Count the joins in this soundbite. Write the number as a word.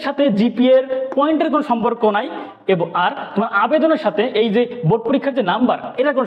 zero